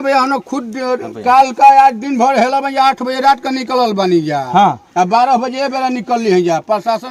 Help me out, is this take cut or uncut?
uncut